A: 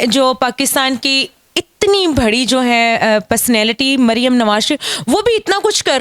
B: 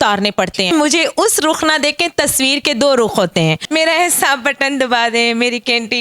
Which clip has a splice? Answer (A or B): B